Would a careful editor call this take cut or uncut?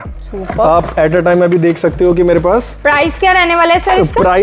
uncut